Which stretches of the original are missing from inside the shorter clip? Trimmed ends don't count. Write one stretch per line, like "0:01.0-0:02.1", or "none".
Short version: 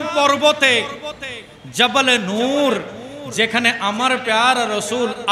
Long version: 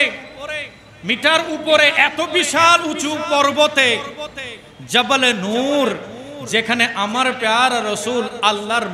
none